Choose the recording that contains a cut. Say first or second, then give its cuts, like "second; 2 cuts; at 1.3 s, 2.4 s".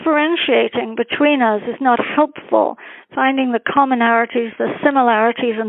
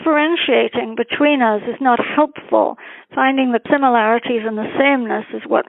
second; 1 cut; at 3.6 s